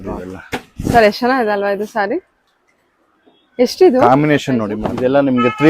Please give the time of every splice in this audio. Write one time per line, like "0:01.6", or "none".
0:04.8